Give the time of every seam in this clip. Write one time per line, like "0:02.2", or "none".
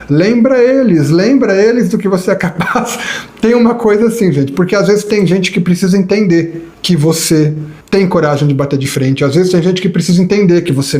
0:06.7
0:07.7